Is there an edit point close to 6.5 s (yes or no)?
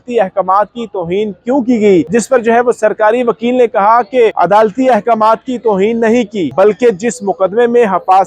yes